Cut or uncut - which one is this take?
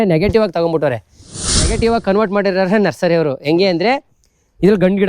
cut